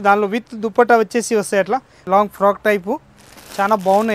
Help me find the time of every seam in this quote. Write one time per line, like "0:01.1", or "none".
0:02.0